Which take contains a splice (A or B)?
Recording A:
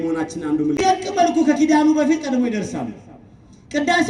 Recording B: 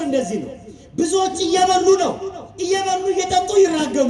A